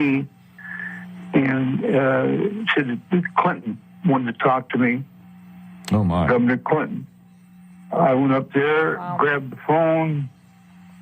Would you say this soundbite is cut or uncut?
uncut